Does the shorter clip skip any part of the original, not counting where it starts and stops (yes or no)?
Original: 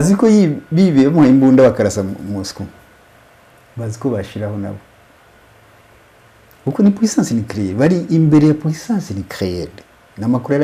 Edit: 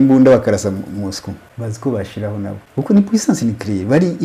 yes